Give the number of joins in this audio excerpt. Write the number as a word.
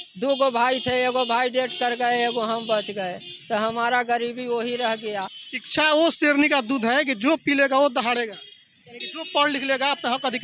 one